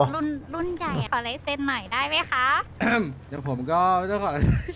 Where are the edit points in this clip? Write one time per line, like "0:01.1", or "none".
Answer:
0:01.1
0:02.7